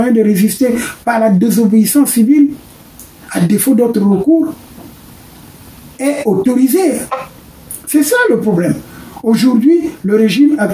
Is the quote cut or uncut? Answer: uncut